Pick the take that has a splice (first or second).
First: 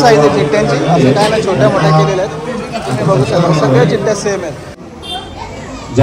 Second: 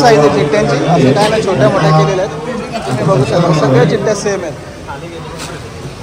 first